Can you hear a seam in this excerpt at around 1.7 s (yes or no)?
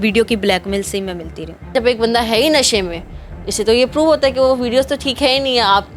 yes